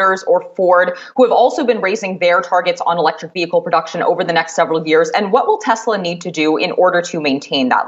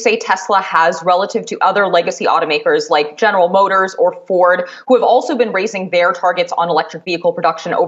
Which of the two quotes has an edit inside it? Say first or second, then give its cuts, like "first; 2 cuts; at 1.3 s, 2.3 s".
first; 1 cut; at 5.1 s